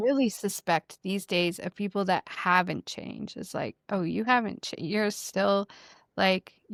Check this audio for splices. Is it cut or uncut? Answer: uncut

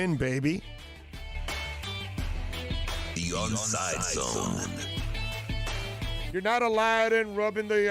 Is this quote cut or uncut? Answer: uncut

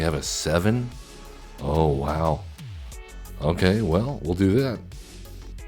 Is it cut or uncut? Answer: uncut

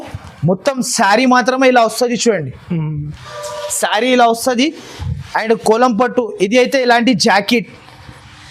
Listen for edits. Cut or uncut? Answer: uncut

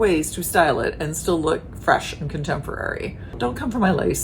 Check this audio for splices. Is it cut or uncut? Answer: cut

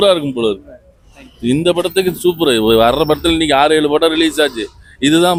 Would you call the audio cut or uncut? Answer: uncut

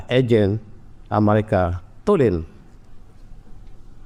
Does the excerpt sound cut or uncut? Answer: uncut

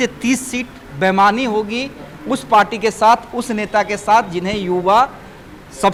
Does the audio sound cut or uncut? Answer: uncut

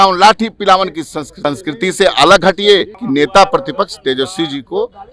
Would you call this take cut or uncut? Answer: cut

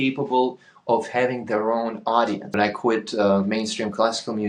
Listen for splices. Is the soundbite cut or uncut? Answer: cut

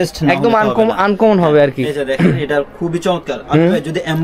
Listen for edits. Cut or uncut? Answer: uncut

